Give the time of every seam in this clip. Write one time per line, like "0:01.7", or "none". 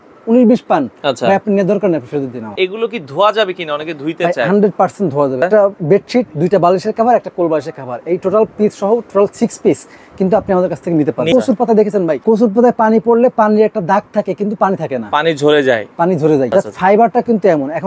0:02.5
0:05.5
0:11.3
0:12.2
0:16.5

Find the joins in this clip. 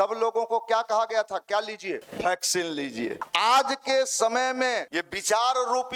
0:02.1
0:03.2
0:04.9

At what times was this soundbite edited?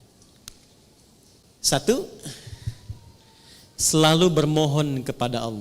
0:01.4

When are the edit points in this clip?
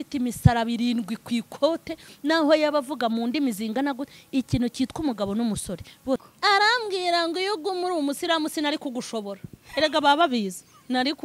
0:06.3

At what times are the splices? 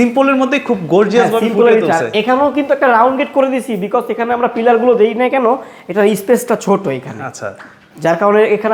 none

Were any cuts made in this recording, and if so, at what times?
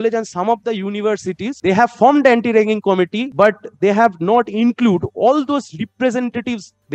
0:01.5
0:03.2

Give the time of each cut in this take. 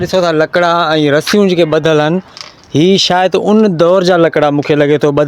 none

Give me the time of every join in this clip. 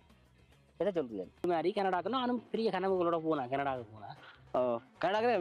0:01.5

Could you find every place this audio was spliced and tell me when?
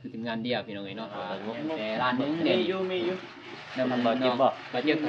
0:01.3

